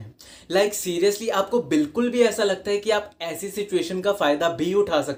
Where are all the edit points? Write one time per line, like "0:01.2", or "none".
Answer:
none